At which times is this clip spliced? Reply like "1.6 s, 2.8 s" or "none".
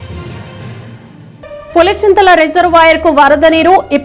1.2 s